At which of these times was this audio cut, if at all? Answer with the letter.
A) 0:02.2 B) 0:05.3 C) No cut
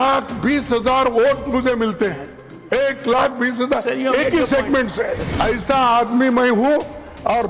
B